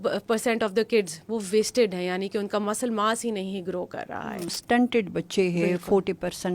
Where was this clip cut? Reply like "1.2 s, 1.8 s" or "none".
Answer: 4.6 s